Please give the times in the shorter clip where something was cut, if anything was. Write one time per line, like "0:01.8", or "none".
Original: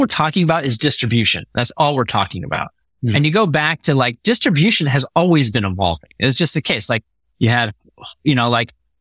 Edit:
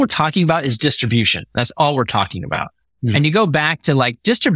none